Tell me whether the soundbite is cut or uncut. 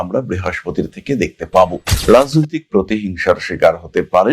cut